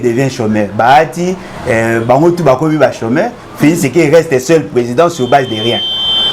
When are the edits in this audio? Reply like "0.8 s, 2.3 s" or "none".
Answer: none